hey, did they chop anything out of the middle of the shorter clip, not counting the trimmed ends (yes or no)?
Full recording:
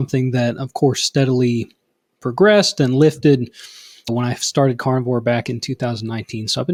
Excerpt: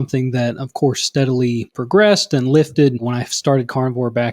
yes